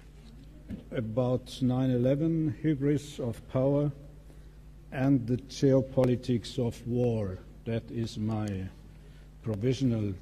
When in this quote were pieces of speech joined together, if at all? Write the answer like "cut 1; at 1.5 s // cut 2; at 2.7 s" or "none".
none